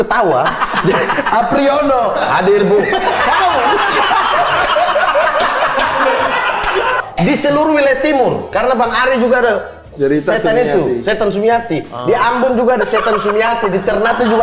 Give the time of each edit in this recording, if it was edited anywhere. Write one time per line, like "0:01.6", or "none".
0:07.0